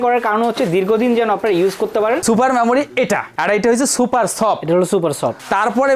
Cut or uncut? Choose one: cut